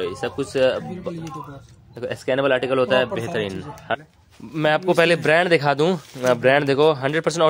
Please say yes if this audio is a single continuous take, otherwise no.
no